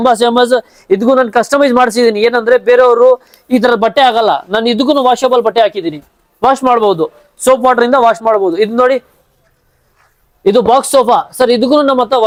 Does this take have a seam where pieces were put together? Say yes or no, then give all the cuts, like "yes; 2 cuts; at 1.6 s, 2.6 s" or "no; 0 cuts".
no; 0 cuts